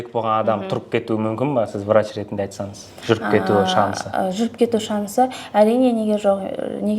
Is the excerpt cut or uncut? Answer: uncut